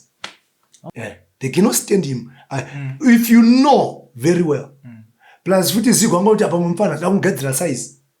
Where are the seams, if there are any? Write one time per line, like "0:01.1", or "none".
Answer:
0:00.9